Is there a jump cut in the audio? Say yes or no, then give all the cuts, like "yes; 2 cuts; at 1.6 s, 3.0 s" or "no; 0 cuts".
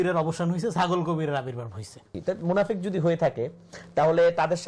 yes; 1 cut; at 2.1 s